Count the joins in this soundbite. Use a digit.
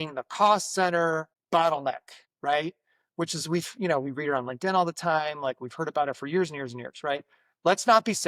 0